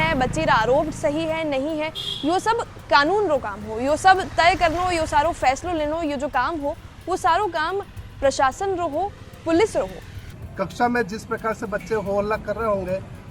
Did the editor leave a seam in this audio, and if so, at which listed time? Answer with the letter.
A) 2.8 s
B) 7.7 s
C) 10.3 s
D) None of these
C